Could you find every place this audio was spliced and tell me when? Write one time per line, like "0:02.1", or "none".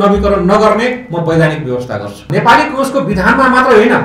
0:02.3